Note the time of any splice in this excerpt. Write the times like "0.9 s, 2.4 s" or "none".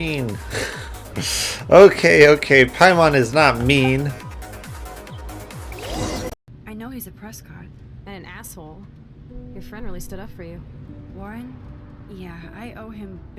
6.5 s